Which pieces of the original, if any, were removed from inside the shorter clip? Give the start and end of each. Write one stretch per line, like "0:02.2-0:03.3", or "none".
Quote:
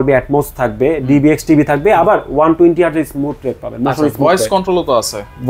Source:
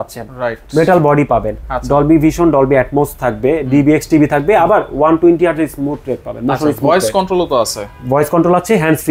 none